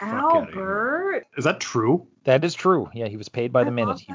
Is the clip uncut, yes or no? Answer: no